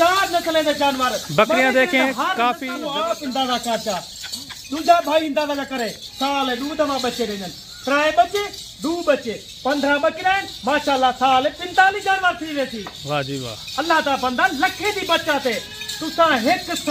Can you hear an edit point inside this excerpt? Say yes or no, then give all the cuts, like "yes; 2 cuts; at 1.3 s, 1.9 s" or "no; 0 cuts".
yes; 1 cut; at 2.7 s